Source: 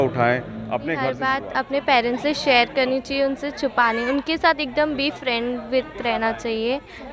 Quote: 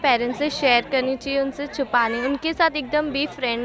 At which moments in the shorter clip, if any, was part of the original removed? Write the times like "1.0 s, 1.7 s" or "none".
none

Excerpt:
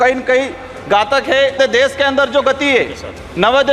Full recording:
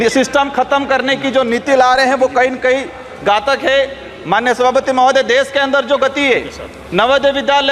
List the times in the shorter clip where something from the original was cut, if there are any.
1.6 s

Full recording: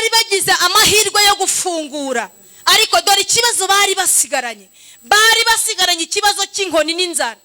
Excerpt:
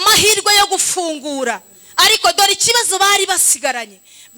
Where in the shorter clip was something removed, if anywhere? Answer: none

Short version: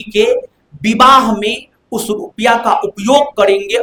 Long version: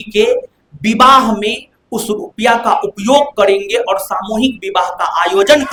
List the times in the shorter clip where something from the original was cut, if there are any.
none

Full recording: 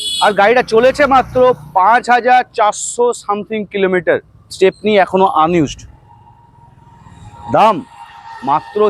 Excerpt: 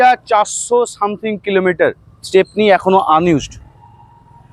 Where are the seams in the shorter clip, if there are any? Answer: none

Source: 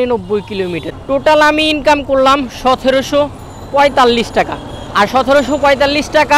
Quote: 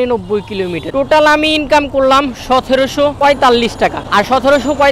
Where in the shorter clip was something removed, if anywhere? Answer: 0.8 s, 3.2 s, 4.0 s

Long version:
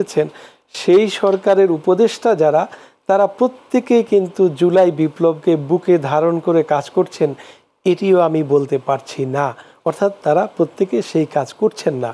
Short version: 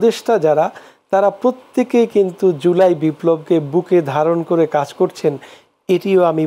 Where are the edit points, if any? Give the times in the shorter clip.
none

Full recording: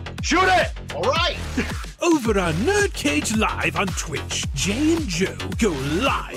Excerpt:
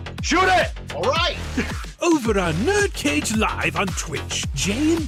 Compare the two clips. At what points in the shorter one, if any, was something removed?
none

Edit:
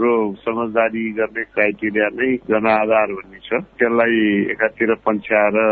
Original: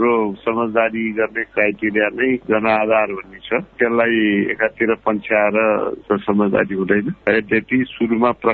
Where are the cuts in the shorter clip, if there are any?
none

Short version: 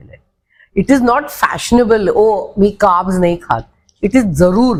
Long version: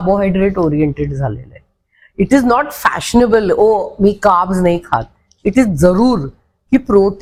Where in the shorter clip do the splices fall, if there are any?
none

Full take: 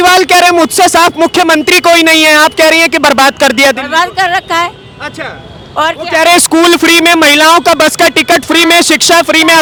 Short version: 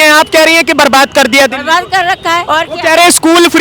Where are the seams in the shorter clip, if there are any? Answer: 2.5 s

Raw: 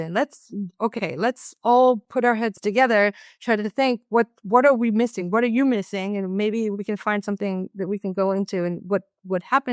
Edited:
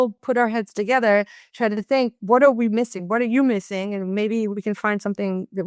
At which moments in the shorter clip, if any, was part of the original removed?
2.1 s

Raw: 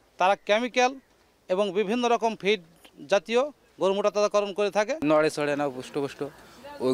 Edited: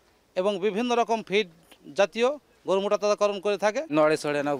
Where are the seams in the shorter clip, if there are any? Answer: none

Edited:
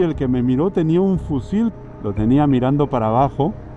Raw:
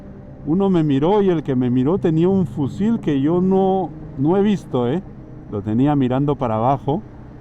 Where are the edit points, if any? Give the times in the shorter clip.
1.7 s

